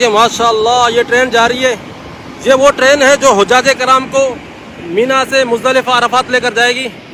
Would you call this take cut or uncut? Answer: uncut